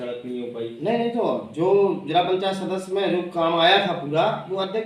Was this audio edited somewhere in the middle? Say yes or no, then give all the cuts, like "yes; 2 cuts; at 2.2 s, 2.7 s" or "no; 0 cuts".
no; 0 cuts